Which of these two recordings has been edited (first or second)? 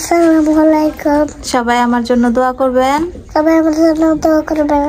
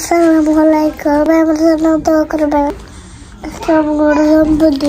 second